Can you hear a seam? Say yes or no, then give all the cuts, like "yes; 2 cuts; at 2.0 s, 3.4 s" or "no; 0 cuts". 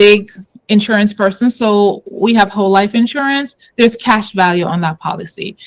no; 0 cuts